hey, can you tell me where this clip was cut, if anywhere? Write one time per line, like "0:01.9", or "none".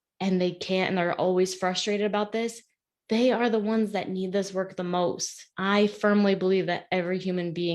0:05.5

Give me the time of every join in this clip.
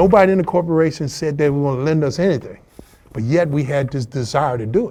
none

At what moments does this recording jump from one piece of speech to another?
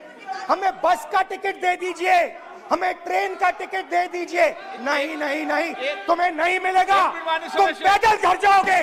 none

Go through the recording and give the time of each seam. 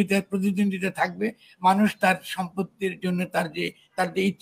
none

